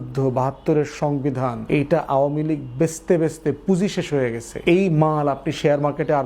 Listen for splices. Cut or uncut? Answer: cut